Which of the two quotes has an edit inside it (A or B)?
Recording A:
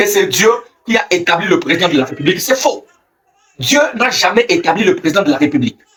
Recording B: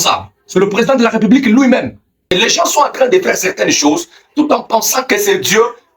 B